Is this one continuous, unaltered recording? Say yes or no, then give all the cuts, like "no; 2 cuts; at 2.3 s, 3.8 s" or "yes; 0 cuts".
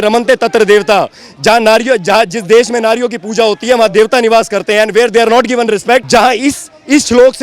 no; 1 cut; at 6.0 s